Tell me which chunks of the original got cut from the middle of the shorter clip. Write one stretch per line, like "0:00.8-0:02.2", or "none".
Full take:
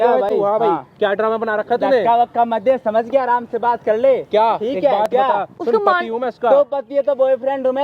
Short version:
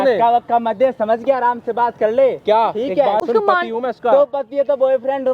0:05.1-0:05.6